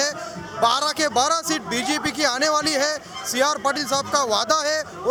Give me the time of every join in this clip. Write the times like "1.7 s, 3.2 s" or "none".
none